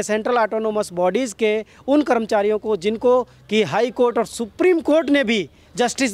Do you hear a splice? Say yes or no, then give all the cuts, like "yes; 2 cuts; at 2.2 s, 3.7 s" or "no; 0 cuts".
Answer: no; 0 cuts